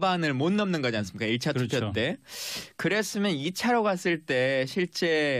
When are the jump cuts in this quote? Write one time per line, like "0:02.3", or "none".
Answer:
none